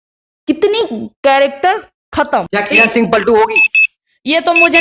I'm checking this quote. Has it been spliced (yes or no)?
yes